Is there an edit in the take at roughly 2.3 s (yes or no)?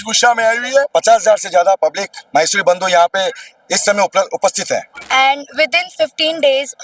no